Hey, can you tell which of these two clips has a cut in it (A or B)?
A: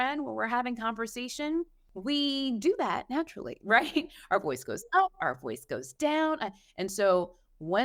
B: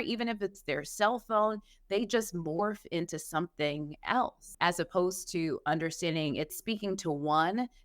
B